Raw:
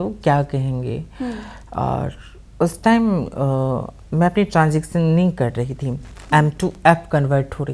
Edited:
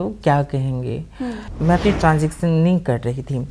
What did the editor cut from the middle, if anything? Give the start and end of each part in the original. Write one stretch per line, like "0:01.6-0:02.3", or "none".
0:01.5-0:04.0